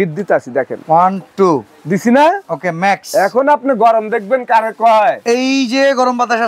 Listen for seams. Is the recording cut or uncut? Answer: uncut